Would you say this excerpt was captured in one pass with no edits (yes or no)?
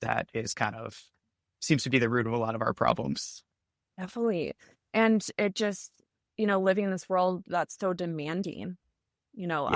yes